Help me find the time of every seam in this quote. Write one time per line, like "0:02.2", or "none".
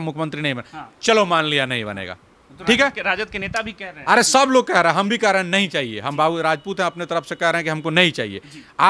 none